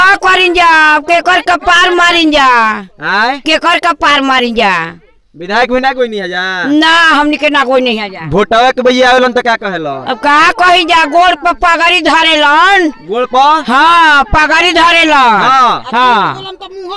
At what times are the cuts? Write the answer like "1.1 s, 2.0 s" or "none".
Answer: none